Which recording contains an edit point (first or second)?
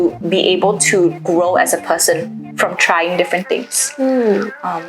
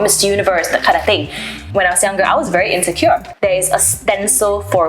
second